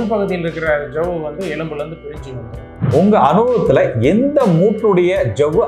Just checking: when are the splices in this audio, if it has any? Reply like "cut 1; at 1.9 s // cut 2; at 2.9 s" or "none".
cut 1; at 2.7 s